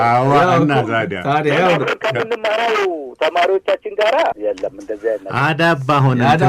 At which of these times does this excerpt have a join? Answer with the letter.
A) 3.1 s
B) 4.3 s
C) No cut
B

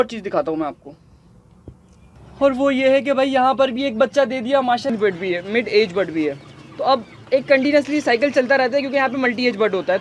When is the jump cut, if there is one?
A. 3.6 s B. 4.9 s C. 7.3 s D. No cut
B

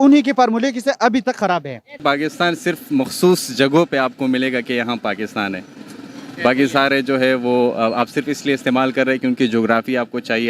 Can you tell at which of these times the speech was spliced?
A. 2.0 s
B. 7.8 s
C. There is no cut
A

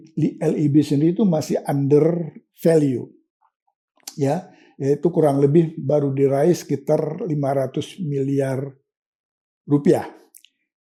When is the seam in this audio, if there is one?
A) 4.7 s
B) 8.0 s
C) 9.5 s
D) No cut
D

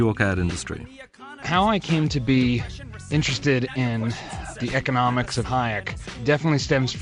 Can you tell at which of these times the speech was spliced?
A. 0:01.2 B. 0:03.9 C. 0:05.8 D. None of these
D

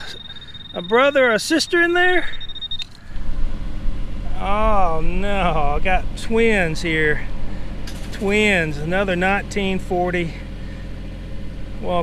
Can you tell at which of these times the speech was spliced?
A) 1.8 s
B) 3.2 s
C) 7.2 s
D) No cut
B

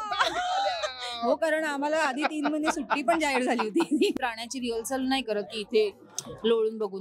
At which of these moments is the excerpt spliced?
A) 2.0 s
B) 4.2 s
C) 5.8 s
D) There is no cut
B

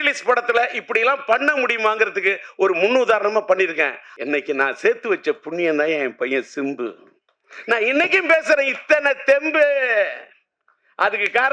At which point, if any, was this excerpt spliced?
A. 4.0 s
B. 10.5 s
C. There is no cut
A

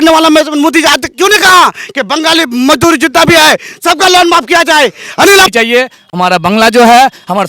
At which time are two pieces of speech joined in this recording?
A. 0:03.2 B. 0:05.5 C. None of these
B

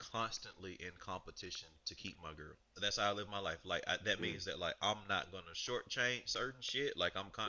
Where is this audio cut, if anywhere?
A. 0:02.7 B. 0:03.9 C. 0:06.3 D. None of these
A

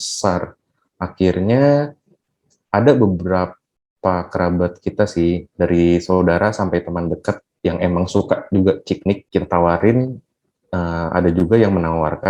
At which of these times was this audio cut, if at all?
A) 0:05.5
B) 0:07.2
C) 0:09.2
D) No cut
C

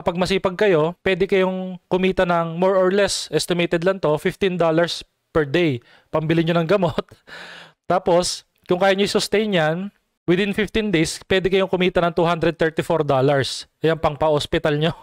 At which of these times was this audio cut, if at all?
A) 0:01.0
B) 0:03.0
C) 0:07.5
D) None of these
A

